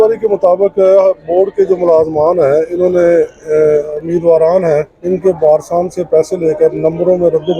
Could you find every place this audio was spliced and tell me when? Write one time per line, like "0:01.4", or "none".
0:04.0
0:05.0